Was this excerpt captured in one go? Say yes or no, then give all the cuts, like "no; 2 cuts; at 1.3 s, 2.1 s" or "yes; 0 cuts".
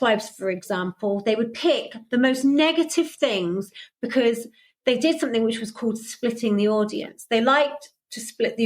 yes; 0 cuts